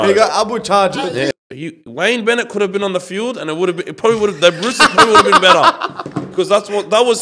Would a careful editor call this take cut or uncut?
cut